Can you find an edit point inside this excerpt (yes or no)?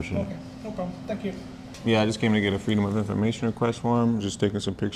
yes